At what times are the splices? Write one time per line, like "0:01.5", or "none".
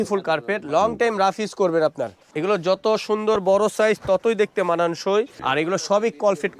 0:02.2
0:05.4